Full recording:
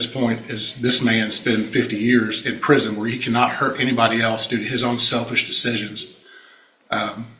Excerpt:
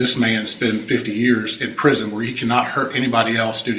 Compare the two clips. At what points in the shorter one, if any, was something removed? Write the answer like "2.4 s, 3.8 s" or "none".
none